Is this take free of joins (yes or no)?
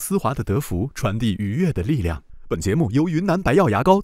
no